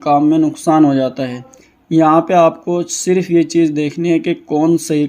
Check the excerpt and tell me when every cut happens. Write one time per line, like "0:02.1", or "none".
0:01.4